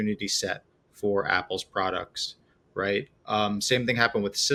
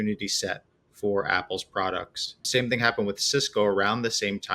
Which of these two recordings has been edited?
second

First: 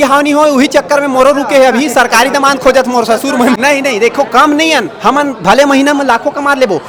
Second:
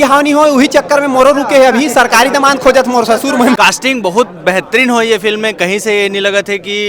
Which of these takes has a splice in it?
second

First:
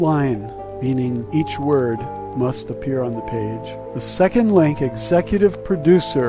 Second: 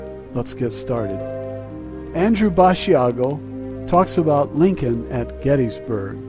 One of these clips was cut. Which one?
first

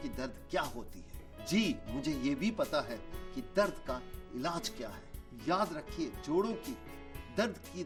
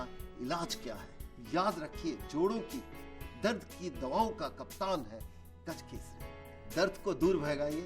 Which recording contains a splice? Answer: second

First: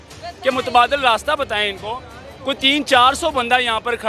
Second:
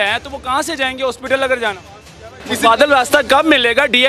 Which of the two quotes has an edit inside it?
second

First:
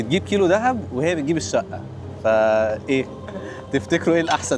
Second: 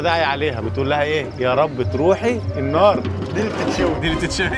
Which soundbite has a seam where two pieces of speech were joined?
second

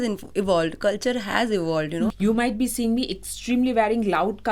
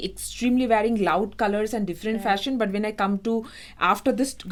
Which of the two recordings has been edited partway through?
first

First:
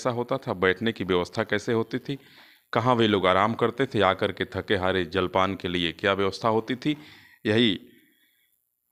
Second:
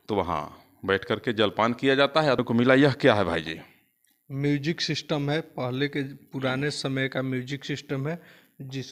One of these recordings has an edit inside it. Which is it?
second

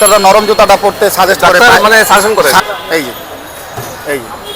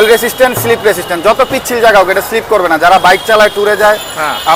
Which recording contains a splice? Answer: first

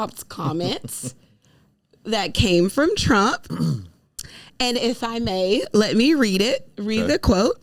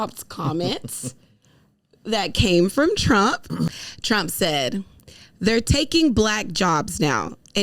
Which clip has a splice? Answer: second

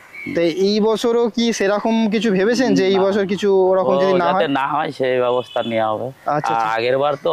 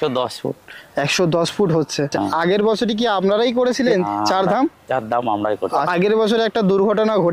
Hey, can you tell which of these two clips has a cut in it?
second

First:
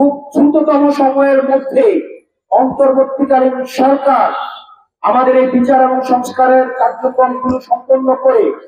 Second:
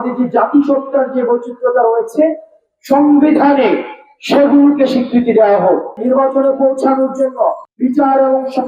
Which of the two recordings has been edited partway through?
second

